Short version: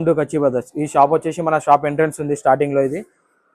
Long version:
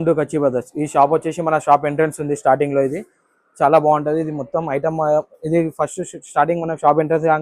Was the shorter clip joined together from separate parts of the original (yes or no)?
no